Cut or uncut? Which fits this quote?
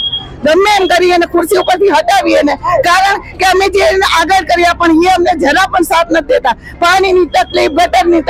uncut